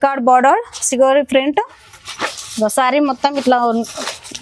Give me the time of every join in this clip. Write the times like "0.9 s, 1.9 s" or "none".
none